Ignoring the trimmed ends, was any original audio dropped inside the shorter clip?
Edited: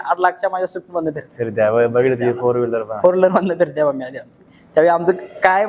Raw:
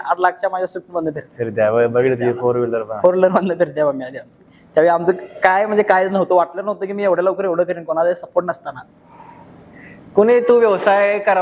no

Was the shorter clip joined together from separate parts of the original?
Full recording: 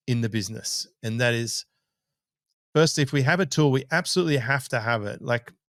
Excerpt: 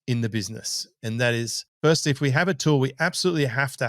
yes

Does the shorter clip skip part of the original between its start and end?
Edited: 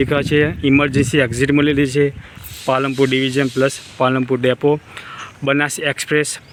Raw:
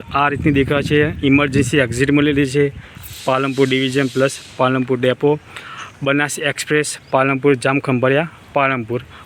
no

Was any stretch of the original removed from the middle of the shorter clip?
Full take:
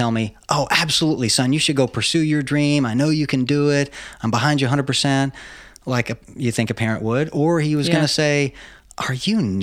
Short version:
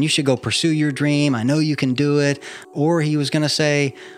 yes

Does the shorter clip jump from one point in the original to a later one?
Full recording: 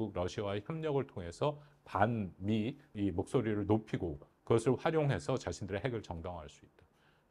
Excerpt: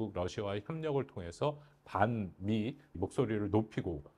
yes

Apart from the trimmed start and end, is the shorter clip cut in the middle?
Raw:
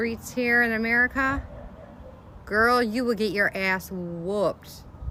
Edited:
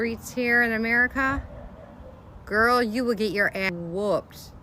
yes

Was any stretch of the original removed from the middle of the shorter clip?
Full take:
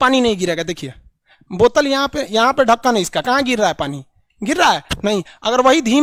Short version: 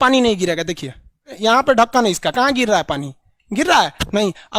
yes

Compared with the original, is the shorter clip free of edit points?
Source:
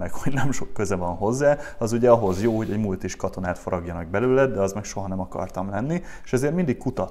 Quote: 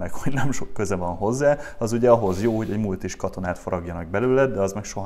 yes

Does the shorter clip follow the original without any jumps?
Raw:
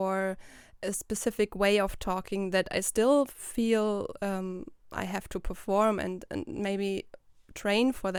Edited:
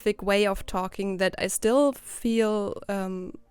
yes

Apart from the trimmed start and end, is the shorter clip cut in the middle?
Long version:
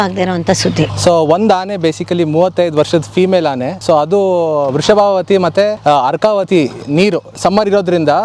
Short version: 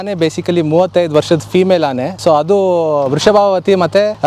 no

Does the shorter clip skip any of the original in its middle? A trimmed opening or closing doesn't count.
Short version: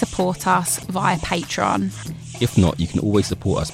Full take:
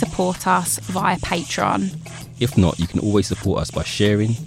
no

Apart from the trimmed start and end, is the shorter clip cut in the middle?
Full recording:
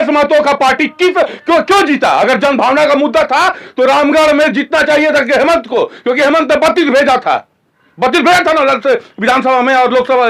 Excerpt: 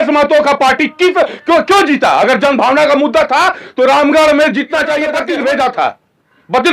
yes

